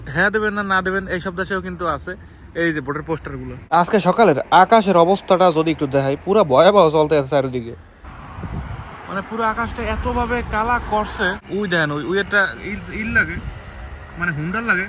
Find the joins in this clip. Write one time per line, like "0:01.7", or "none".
0:03.5
0:11.4